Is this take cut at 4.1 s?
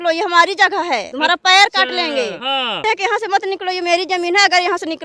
no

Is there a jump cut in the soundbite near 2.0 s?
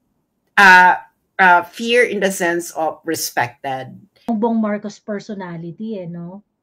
no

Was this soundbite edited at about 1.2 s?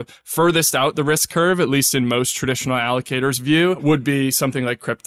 no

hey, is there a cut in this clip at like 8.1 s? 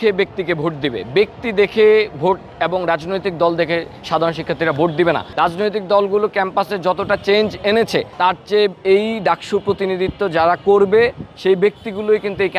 yes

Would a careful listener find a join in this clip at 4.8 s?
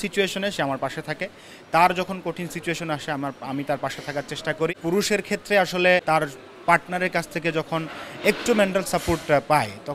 yes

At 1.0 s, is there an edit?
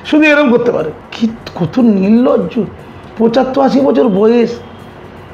yes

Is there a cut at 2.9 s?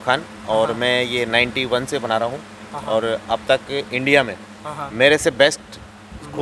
no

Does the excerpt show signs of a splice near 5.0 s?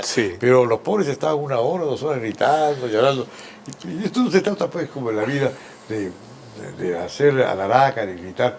yes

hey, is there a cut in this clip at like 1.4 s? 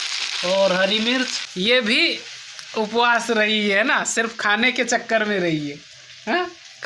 yes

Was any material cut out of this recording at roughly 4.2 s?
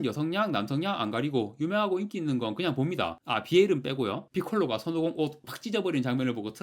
yes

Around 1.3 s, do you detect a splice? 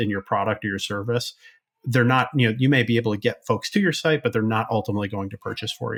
no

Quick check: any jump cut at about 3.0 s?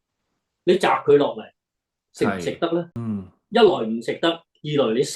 yes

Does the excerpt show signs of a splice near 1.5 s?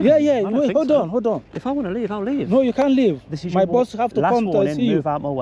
yes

